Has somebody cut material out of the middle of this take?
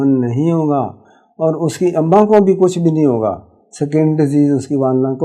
no; 0 cuts

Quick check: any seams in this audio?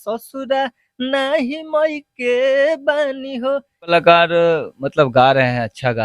yes; 1 cut; at 3.9 s

